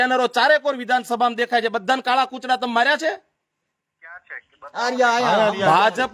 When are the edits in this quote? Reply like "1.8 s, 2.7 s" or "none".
none